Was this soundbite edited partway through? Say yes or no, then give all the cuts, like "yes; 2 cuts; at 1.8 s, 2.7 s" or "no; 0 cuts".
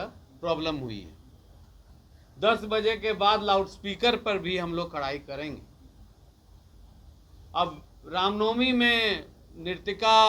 no; 0 cuts